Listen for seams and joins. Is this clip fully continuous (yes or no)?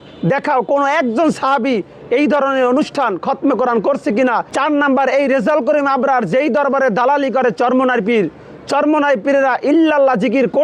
no